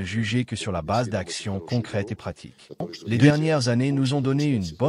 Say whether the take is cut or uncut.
cut